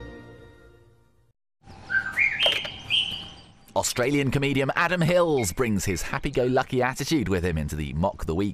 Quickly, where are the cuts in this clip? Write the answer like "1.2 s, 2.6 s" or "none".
1.5 s